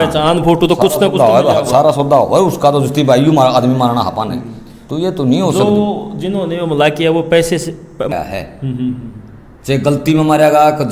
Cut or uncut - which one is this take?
cut